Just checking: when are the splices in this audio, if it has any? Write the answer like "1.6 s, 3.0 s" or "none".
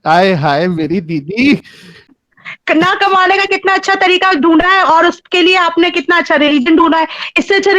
2.2 s

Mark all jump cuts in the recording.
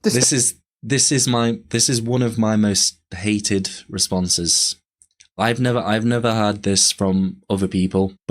none

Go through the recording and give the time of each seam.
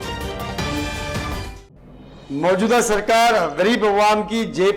1.6 s

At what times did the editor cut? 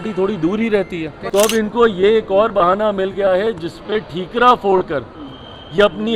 1.2 s

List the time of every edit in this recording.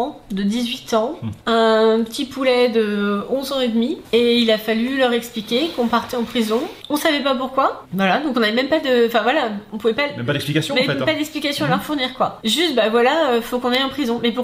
none

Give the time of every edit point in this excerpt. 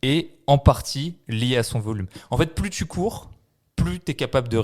none

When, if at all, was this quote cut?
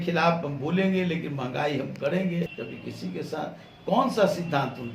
2.5 s

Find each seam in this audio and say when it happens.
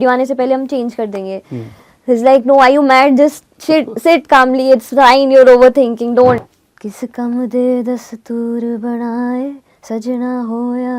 6.5 s

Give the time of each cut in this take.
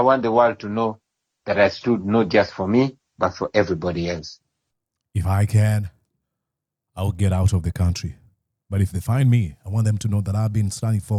none

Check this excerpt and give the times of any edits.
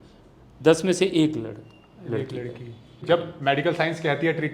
3.0 s

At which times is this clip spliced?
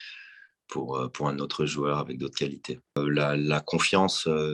3.0 s

